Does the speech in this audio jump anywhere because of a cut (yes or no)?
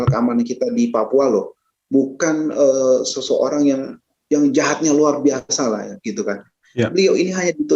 yes